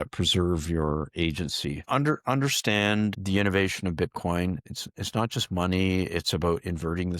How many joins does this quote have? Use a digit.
2